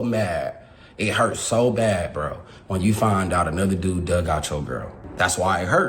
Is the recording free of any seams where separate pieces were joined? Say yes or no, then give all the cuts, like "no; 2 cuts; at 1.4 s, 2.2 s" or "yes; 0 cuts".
no; 1 cut; at 5.0 s